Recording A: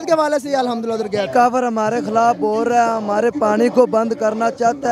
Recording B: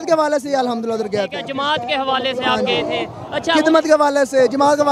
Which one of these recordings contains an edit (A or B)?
A